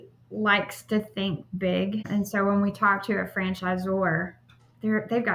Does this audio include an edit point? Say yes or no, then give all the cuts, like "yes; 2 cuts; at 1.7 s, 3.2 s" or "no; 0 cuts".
yes; 1 cut; at 2.1 s